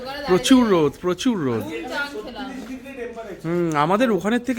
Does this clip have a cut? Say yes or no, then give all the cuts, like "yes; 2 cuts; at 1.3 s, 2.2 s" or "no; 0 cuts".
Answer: no; 0 cuts